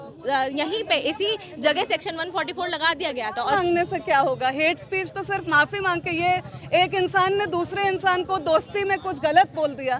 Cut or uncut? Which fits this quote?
cut